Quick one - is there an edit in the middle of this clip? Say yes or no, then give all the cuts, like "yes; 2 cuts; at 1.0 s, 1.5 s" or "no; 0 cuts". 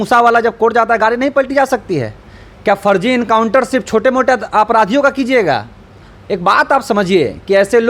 no; 0 cuts